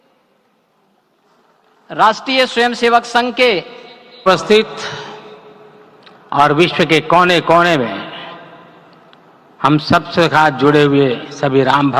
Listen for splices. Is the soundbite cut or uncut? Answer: cut